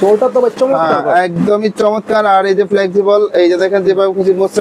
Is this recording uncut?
yes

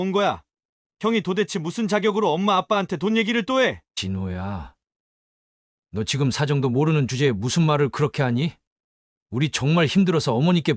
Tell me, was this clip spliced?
yes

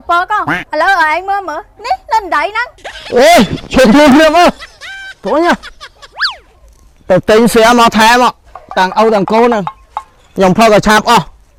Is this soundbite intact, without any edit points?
yes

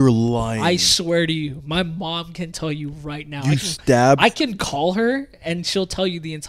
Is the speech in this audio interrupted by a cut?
no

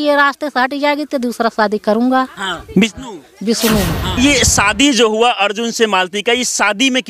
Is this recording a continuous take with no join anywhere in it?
no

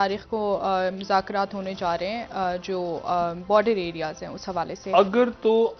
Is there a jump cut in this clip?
yes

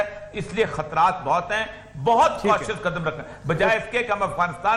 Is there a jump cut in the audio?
no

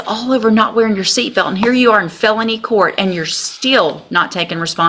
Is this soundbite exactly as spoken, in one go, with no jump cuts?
yes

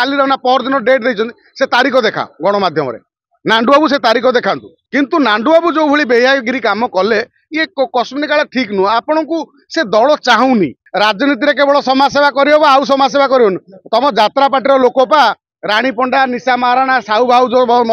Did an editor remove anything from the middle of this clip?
yes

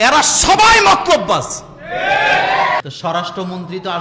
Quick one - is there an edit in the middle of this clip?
yes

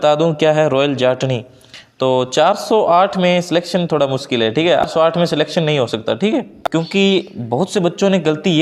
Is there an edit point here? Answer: yes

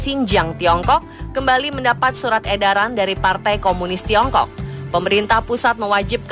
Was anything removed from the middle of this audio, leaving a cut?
yes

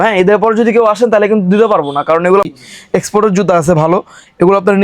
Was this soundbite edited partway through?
yes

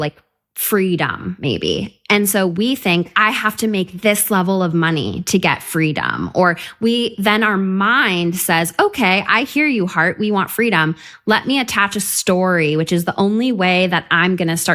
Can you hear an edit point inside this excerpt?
no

